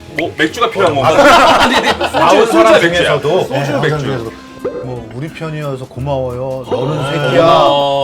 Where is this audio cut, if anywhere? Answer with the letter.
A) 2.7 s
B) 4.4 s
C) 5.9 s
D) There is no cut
B